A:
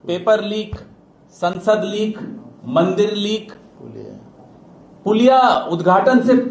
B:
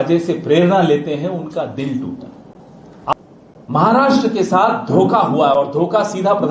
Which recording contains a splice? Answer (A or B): B